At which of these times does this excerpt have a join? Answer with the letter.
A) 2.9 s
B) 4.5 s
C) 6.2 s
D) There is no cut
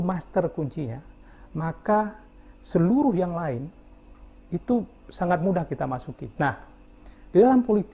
C